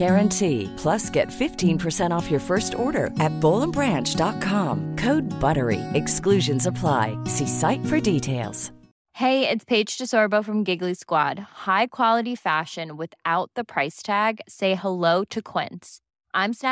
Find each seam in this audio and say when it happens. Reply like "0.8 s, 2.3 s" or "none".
none